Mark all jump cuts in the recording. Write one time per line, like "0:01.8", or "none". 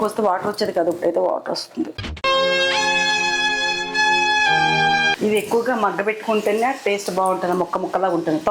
0:02.0
0:05.2